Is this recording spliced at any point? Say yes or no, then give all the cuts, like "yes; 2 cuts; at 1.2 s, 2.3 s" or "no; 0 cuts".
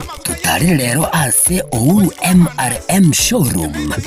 yes; 1 cut; at 0.9 s